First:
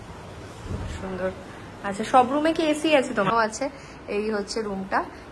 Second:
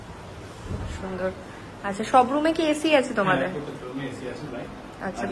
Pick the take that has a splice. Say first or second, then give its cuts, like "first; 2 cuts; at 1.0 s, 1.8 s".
first; 1 cut; at 3.3 s